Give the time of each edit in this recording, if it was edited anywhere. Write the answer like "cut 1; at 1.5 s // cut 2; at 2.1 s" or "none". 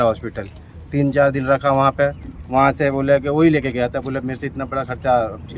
none